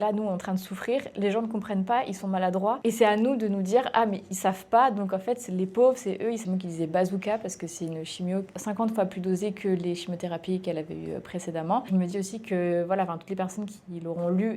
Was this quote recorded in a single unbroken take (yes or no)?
no